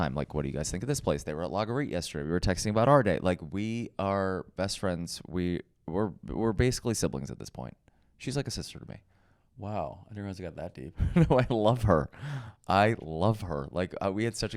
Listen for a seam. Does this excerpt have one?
no; 0 cuts

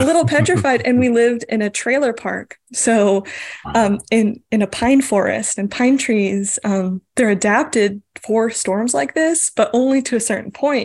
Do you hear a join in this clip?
no; 0 cuts

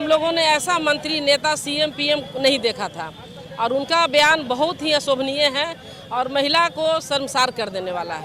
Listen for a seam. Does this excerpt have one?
no; 0 cuts

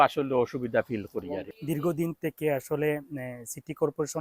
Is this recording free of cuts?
no; 1 cut; at 1.5 s

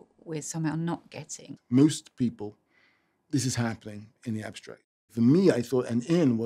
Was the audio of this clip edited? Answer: yes; 2 cuts; at 1.5 s, 4.9 s

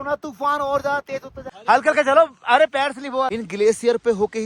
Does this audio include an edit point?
yes; 2 cuts; at 1.5 s, 3.3 s

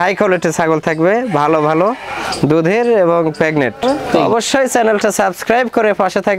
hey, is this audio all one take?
no; 1 cut; at 3.8 s

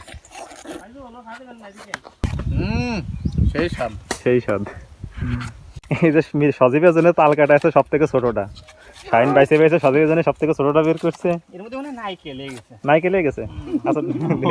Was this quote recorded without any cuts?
yes; 0 cuts

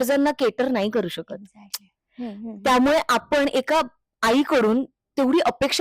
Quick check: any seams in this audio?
no; 0 cuts

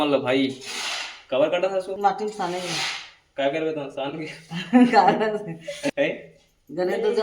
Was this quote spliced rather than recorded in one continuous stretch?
yes; 2 cuts; at 2.0 s, 5.9 s

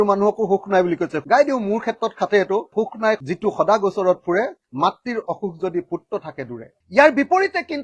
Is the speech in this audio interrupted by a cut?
yes; 3 cuts; at 1.2 s, 2.7 s, 6.6 s

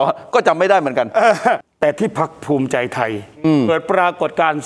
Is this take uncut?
no; 1 cut; at 1.7 s

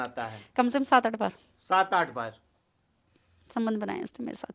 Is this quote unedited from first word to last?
yes; 0 cuts

